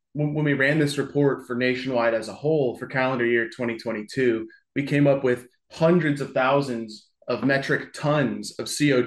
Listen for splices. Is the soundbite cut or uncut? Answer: uncut